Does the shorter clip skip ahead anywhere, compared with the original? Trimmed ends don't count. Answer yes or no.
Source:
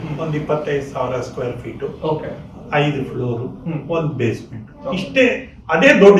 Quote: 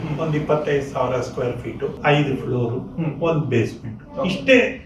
yes